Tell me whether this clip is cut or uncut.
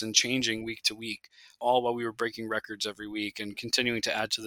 cut